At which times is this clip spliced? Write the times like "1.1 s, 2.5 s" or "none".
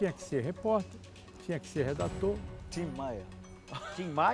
2.6 s

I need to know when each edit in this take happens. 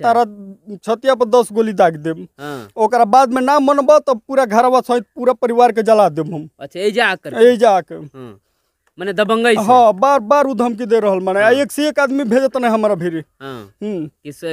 none

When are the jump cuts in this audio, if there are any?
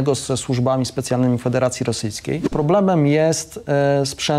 2.5 s

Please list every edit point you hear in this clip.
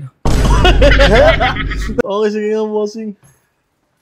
2.0 s

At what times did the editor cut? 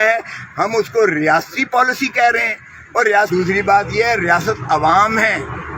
3.3 s

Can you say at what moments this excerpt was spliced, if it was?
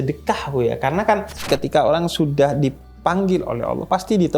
1.5 s

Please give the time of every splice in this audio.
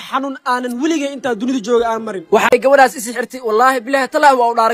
2.5 s

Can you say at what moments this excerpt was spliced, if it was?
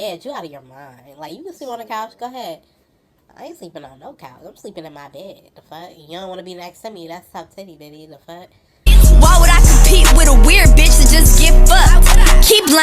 8.8 s

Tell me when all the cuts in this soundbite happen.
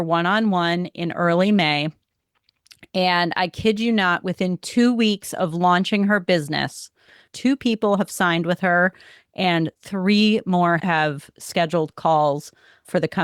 7.3 s, 10.8 s

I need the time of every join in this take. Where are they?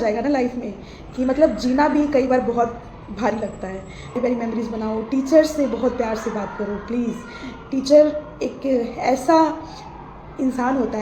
4.2 s

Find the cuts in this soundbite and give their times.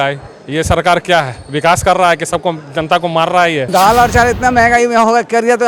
3.7 s

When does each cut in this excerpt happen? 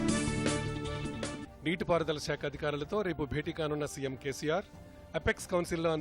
1.5 s

